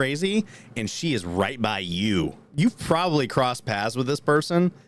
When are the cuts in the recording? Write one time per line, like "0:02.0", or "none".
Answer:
0:02.5